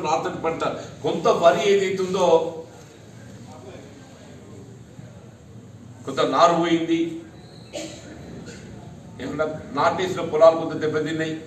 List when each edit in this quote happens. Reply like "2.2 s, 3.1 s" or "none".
none